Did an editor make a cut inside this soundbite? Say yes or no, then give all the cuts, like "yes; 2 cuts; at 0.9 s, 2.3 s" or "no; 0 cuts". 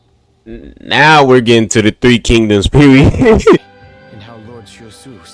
yes; 1 cut; at 3.6 s